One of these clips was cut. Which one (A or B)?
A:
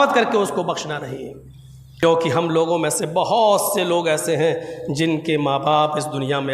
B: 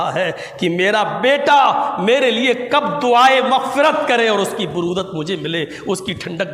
A